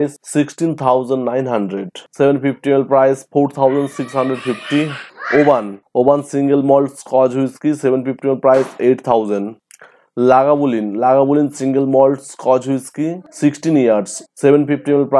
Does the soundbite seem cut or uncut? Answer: cut